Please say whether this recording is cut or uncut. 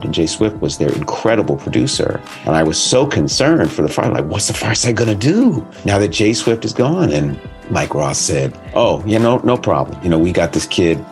cut